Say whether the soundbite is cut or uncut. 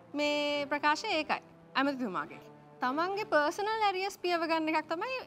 cut